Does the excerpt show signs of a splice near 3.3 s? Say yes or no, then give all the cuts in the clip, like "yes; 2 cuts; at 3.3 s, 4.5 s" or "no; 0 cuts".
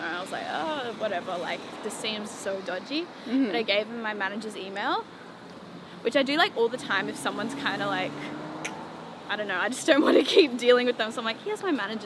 no; 0 cuts